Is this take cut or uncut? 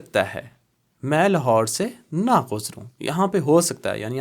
uncut